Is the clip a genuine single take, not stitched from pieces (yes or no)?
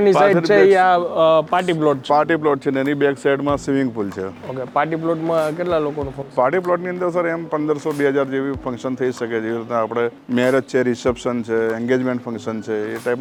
yes